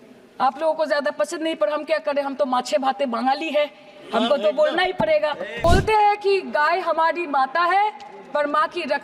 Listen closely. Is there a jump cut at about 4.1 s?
no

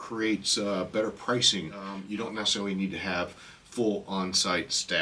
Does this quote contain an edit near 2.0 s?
yes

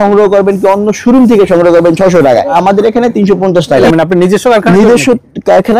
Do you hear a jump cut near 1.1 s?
no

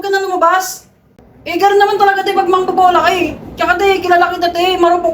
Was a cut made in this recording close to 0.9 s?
yes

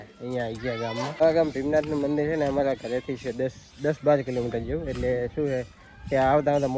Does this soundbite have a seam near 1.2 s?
yes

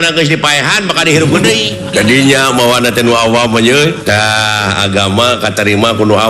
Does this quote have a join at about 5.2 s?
no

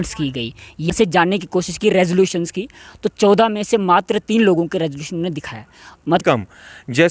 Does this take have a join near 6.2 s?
yes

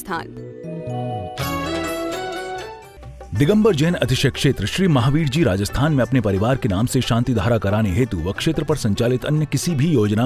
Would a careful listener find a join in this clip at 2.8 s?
yes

